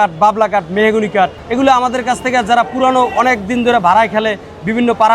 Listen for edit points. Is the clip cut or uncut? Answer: cut